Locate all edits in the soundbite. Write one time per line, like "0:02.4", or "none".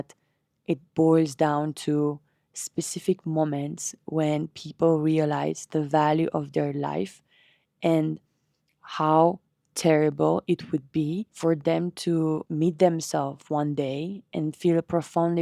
0:11.3
0:12.5

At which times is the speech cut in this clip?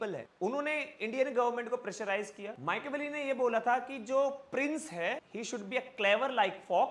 0:02.5

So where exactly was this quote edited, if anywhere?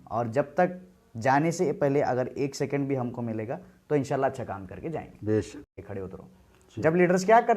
0:05.8

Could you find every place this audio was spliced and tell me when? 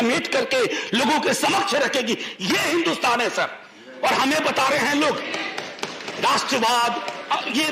none

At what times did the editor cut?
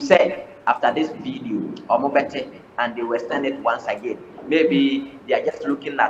none

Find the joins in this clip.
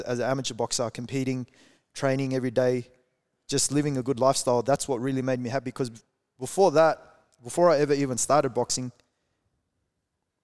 none

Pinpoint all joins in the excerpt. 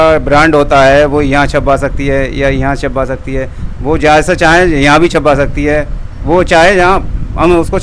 none

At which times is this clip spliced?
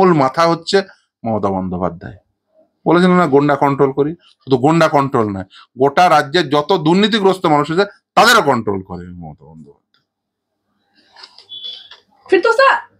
none

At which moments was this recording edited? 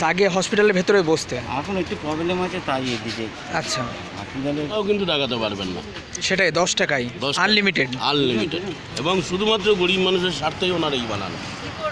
0:04.7

